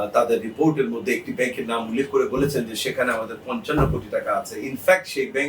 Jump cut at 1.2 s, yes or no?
no